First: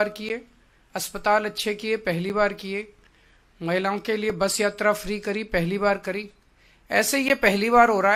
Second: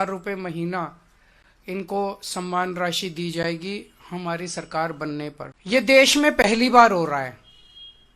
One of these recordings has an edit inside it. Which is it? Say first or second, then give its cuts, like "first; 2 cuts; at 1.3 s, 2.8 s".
second; 1 cut; at 5.5 s